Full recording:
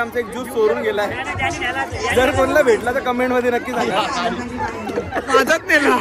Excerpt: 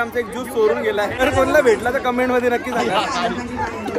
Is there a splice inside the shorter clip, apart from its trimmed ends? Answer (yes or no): yes